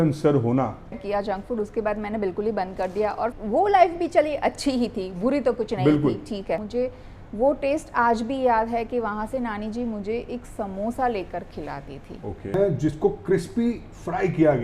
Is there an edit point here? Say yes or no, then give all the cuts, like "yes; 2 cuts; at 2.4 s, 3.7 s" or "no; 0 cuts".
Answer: yes; 4 cuts; at 1.0 s, 3.4 s, 6.7 s, 12.5 s